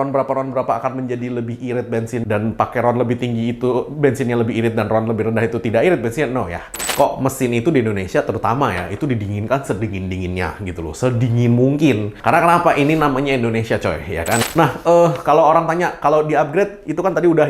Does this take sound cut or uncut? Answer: cut